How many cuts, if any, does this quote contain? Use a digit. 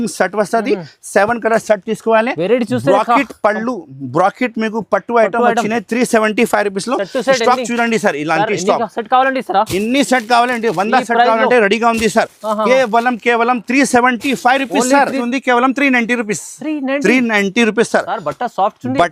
1